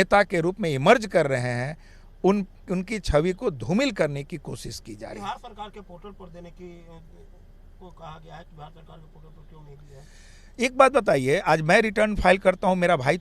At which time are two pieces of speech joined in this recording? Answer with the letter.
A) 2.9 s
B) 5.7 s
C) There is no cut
C